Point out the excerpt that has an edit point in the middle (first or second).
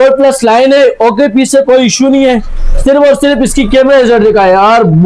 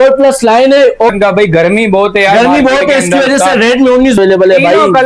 second